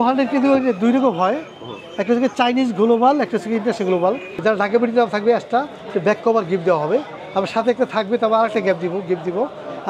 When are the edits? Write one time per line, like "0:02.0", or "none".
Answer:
0:04.4

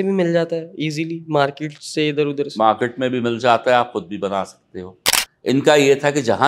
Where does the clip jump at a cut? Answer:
0:04.9

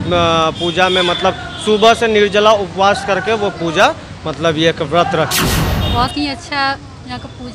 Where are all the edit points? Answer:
0:05.8

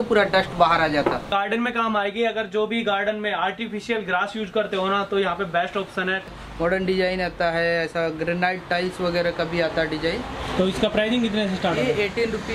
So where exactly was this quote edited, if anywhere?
0:01.3
0:06.2

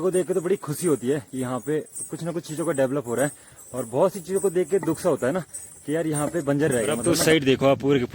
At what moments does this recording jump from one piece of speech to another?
0:07.0

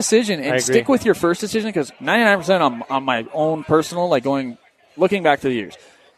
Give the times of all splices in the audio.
none

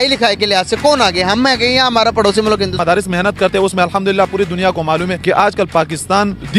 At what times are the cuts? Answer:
0:04.8

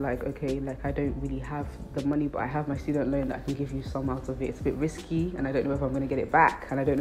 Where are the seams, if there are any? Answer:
0:02.5

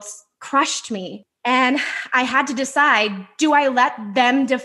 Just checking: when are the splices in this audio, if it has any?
0:01.2

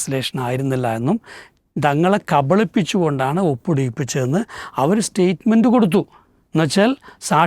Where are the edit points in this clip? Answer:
none

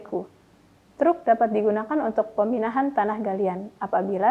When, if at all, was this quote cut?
none

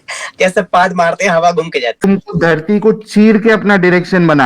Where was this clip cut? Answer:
0:02.0

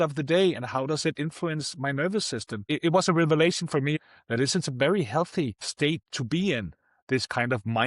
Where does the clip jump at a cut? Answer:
0:02.7
0:03.9
0:05.7

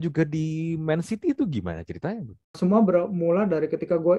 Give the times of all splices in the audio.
0:02.6

